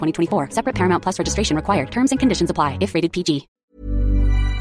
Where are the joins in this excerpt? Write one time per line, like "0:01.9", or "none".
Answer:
0:03.5